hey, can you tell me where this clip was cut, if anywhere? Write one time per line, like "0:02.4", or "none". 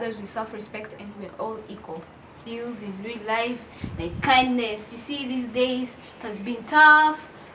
0:02.3